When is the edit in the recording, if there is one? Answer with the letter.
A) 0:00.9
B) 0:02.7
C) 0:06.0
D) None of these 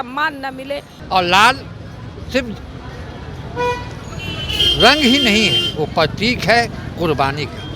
A